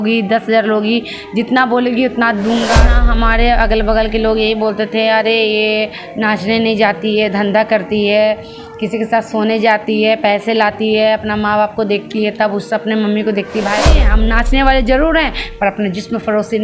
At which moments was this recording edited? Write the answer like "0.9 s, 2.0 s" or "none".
3.0 s, 14.1 s